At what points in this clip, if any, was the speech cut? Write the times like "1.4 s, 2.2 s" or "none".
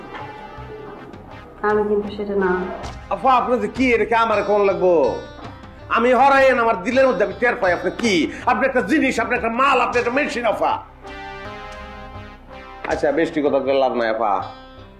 11.4 s